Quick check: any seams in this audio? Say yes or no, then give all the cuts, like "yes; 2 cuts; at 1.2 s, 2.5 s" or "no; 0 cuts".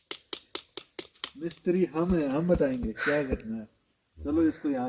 no; 0 cuts